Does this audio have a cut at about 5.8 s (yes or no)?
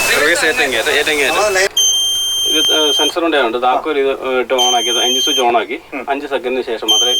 no